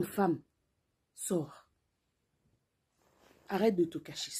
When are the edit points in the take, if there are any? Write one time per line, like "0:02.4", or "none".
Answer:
none